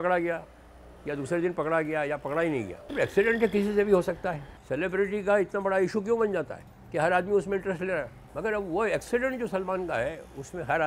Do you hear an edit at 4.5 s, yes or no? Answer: yes